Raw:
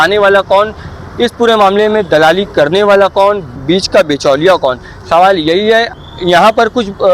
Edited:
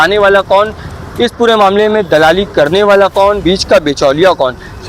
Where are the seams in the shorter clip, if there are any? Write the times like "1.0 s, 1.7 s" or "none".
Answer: 3.4 s